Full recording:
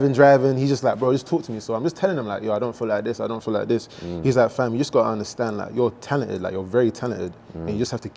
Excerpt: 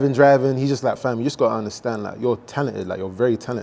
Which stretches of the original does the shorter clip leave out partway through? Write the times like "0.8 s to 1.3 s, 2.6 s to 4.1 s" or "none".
1.0 s to 4.5 s